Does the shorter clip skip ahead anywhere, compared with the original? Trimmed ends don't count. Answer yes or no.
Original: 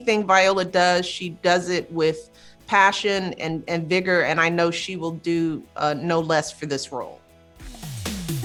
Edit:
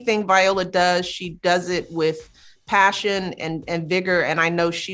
no